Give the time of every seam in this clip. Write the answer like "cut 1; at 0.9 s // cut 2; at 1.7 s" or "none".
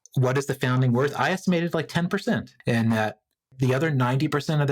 cut 1; at 2.5 s // cut 2; at 3.5 s